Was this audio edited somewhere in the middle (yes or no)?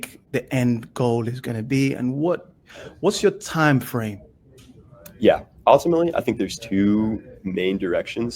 no